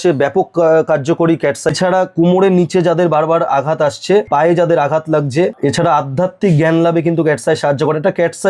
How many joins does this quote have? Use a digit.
3